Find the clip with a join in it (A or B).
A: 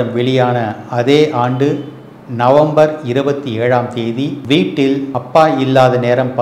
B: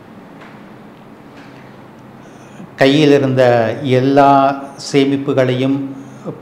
A